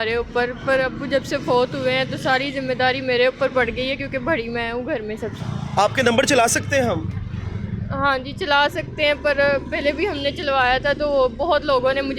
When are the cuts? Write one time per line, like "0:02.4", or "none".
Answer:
0:05.4